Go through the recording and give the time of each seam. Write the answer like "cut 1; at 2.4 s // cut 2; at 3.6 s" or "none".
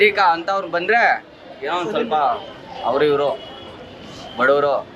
none